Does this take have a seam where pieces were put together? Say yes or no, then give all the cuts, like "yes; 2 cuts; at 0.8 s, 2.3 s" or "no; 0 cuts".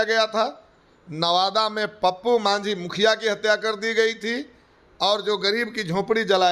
no; 0 cuts